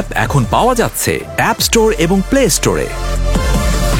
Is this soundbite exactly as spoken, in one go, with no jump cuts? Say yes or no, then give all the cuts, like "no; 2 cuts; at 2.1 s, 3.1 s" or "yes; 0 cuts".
yes; 0 cuts